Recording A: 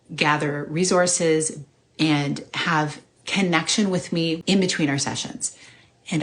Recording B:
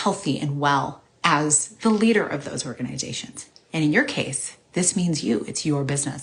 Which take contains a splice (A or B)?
A